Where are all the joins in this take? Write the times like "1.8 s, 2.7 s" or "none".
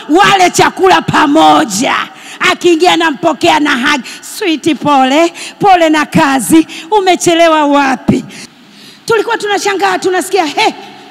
8.4 s